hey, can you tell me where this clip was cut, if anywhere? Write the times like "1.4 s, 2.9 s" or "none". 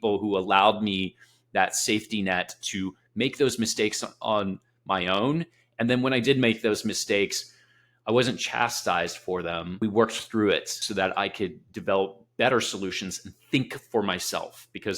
9.8 s, 10.8 s